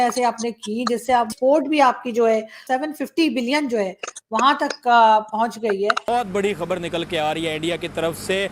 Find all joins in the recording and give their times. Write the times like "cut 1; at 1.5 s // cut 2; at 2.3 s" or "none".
cut 1; at 1.3 s // cut 2; at 2.6 s // cut 3; at 6.0 s